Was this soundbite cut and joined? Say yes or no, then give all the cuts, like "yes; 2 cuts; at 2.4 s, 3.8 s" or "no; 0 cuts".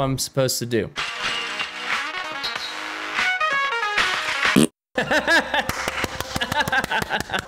yes; 1 cut; at 0.9 s